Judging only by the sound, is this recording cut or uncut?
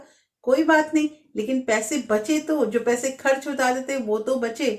uncut